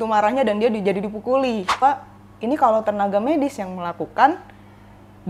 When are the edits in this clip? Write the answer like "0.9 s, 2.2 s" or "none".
1.8 s